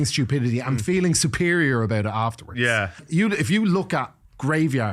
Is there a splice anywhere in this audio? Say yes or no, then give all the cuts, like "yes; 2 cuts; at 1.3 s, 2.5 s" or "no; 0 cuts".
yes; 1 cut; at 3.0 s